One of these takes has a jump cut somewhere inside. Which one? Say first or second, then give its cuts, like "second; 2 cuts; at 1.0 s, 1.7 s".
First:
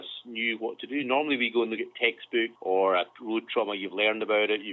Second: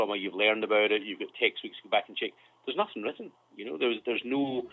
first; 1 cut; at 2.6 s